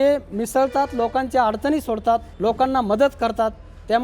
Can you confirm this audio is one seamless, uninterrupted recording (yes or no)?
no